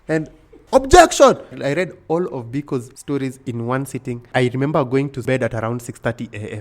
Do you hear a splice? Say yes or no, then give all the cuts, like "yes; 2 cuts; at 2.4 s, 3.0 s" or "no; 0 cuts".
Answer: yes; 4 cuts; at 1.6 s, 2.9 s, 4.3 s, 5.2 s